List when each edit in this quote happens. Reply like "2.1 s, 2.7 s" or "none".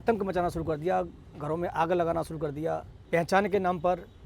2.9 s